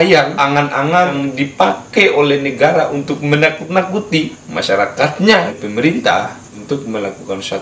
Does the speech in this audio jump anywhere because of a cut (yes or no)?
yes